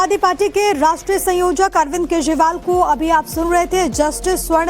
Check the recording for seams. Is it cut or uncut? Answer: cut